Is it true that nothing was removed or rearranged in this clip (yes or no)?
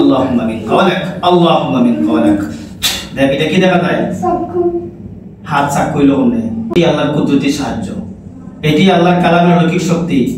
no